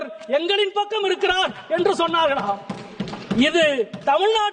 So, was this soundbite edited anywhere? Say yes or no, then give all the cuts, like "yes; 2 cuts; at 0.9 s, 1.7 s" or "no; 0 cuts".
no; 0 cuts